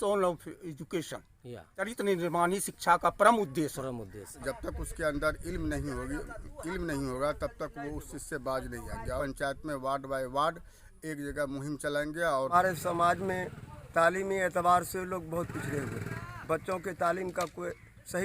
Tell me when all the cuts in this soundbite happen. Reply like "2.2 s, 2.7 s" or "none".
1.8 s, 4.3 s, 9.2 s, 12.5 s